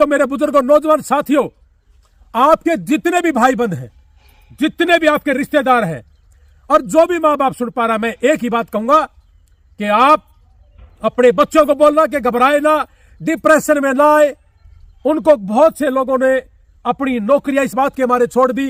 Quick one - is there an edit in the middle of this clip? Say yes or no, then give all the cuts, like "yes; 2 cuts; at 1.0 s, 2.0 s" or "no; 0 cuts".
no; 0 cuts